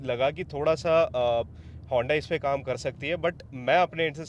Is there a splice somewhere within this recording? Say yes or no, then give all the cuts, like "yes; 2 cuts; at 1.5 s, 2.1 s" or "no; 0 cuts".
no; 0 cuts